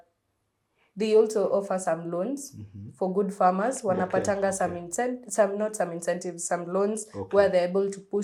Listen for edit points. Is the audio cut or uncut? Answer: uncut